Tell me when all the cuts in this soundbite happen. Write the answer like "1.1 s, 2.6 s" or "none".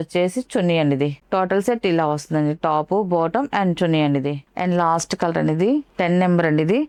none